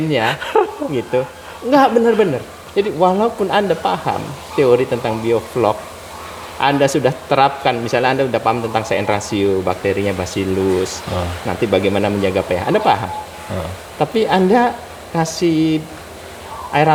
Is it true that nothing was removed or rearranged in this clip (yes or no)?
yes